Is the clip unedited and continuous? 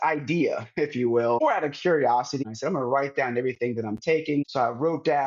no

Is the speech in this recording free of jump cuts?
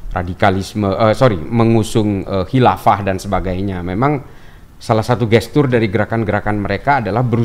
yes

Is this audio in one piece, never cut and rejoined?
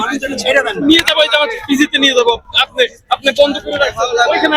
yes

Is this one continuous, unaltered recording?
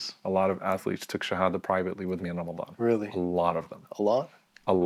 yes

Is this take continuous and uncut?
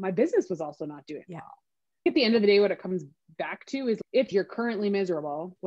no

